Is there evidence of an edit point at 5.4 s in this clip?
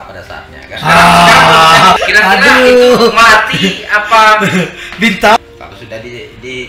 yes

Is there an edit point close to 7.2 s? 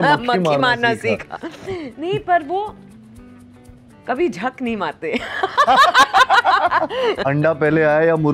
yes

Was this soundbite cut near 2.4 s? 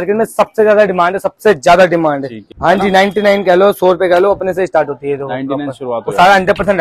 yes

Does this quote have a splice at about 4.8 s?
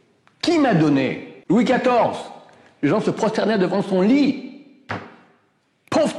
no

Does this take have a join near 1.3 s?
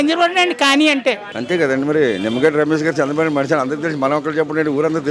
yes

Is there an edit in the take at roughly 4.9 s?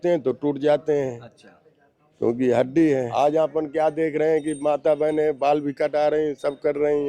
no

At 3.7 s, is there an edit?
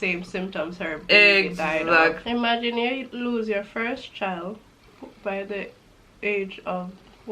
no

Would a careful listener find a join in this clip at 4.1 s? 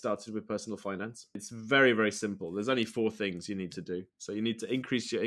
no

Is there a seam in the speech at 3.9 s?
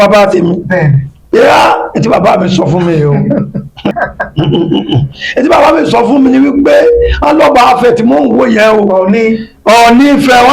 yes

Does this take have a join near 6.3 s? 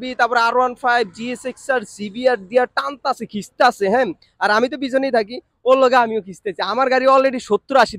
no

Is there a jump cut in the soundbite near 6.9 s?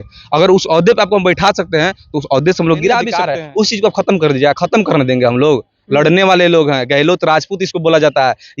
no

